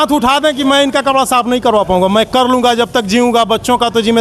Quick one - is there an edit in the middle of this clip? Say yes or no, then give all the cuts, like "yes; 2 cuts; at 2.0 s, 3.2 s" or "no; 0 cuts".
no; 0 cuts